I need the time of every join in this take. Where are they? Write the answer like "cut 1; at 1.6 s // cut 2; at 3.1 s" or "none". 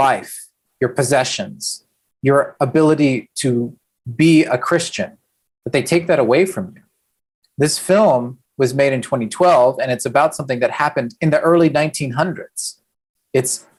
none